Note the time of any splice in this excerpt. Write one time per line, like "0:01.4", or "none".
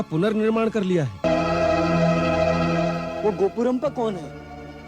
0:01.2